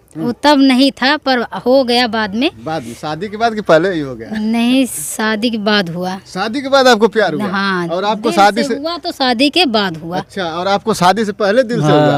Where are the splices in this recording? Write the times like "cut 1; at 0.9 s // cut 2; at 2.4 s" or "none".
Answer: none